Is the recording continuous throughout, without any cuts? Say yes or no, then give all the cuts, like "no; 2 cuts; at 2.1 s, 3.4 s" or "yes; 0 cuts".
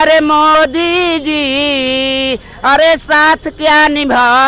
yes; 0 cuts